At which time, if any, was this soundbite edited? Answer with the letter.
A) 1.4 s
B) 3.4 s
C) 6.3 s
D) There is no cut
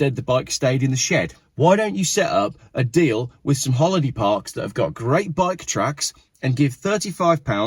A